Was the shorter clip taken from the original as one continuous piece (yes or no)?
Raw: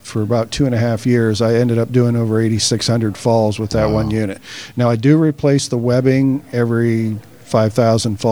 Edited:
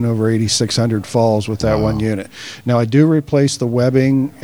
yes